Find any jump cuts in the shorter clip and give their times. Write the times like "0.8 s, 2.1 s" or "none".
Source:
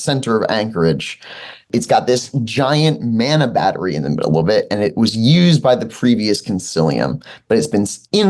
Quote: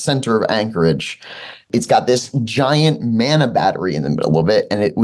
none